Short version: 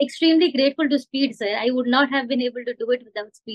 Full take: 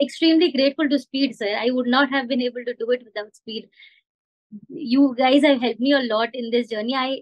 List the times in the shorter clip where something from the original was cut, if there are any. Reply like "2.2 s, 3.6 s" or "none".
none